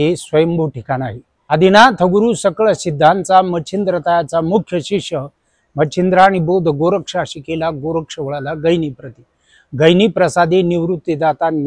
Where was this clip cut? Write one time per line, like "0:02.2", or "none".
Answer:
0:01.3